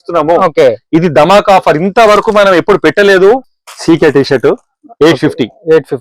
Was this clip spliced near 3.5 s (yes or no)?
yes